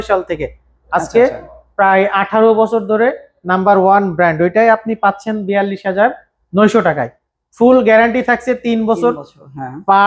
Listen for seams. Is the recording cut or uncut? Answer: uncut